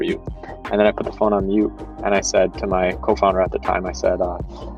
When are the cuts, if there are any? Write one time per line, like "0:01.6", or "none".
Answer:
none